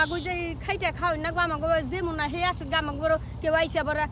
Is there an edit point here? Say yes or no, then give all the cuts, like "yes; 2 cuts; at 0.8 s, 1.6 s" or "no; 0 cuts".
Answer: no; 0 cuts